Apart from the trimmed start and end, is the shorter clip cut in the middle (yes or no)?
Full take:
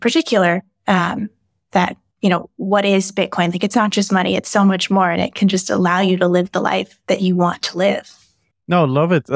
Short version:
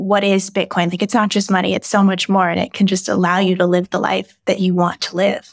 no